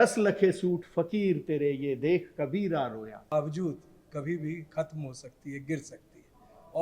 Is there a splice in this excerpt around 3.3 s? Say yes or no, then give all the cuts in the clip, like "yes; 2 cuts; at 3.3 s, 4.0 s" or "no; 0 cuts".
yes; 1 cut; at 3.3 s